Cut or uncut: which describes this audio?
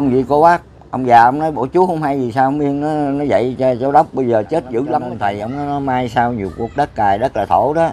cut